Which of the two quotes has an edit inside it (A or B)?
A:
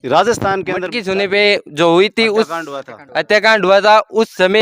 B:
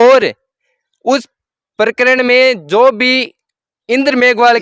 A